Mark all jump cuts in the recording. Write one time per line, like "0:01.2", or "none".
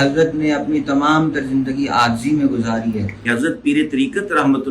0:03.1